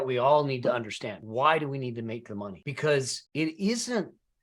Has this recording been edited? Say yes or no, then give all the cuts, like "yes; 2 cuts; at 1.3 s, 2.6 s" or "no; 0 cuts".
yes; 3 cuts; at 1.1 s, 2.6 s, 3.2 s